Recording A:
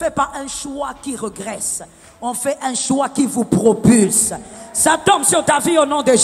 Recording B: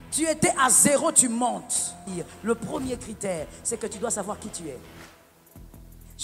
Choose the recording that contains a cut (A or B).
B